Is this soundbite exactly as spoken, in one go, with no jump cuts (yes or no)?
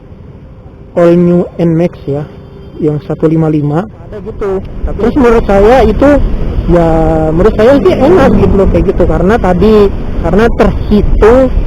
no